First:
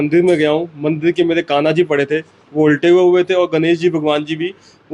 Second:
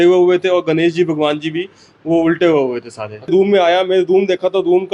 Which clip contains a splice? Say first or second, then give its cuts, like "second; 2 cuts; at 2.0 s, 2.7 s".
second; 1 cut; at 3.3 s